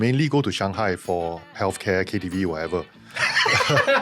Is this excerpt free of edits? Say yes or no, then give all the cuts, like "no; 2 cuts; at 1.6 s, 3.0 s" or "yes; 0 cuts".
no; 1 cut; at 1.4 s